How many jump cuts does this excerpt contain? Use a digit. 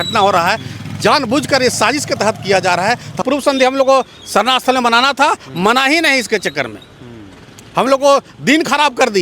1